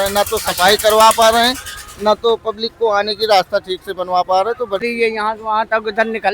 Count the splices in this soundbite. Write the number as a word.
one